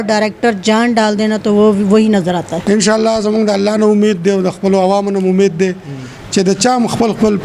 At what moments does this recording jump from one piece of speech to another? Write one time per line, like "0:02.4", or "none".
0:02.6